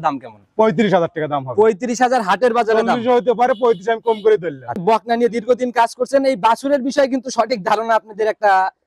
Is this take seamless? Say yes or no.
yes